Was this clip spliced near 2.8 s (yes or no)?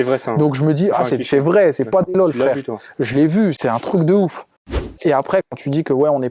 no